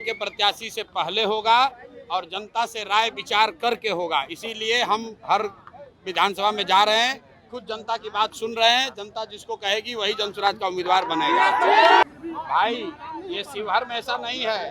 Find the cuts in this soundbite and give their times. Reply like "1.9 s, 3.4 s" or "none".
12.0 s